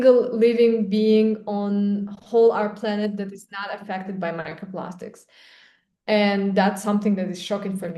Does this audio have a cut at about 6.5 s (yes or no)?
no